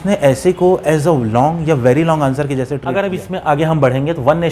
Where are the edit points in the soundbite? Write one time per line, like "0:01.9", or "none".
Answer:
0:02.8